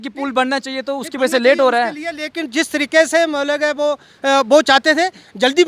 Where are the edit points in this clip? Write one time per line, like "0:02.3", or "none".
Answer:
none